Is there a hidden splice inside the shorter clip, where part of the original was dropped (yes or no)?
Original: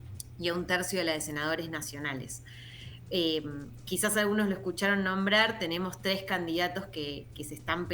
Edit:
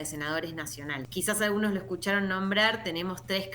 yes